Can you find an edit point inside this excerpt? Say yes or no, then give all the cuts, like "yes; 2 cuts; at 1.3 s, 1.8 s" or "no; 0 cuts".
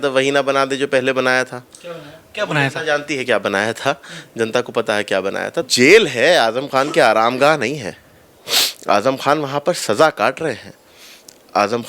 yes; 1 cut; at 5.7 s